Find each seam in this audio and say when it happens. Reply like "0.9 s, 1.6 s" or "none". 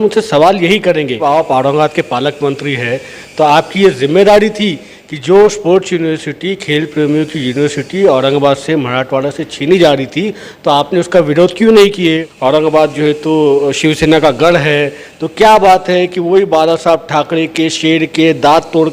1.2 s, 12.3 s